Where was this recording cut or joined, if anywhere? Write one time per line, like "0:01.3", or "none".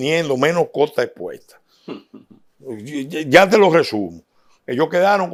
none